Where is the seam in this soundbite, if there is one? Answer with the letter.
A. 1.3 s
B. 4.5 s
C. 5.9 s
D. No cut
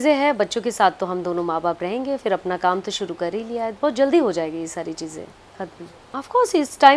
C